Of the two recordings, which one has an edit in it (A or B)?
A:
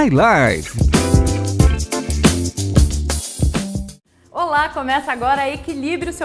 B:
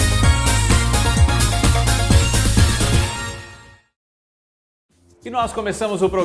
A